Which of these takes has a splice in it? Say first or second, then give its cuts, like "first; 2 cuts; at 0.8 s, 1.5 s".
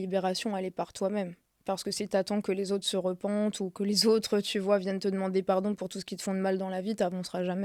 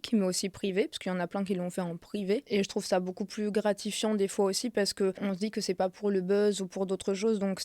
second; 2 cuts; at 2.5 s, 5.2 s